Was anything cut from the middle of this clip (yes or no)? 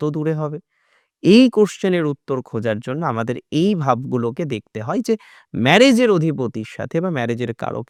no